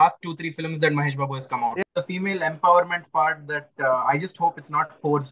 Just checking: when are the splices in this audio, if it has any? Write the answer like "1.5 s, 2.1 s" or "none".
1.8 s